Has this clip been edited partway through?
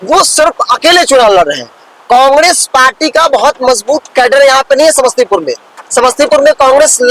no; 0 cuts

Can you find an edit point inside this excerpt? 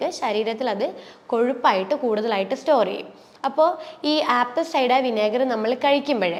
no; 0 cuts

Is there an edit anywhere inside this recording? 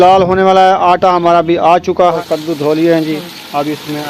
yes; 1 cut; at 2.2 s

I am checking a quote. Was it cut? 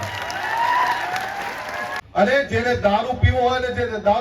yes; 1 cut; at 2.0 s

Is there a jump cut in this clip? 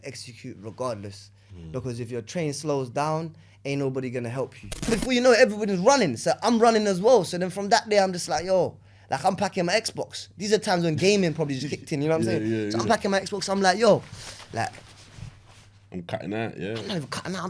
yes; 1 cut; at 4.9 s

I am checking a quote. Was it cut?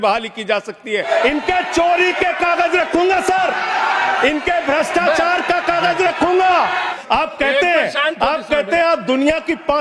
yes; 2 cuts; at 1.0 s, 6.9 s

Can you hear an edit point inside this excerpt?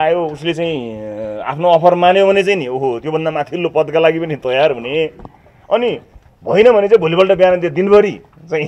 no; 0 cuts

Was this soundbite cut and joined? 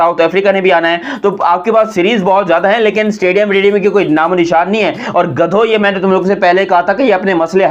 no; 0 cuts

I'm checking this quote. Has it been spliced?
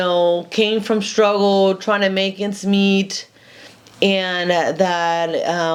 no; 0 cuts

